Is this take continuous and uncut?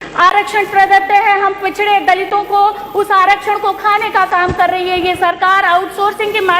yes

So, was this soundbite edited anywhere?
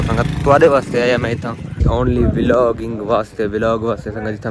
yes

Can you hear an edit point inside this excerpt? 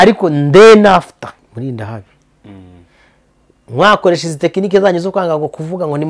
yes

